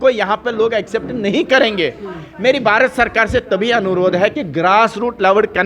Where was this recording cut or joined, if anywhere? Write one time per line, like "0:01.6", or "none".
none